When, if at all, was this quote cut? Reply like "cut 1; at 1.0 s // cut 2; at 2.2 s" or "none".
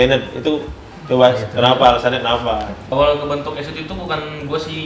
cut 1; at 2.8 s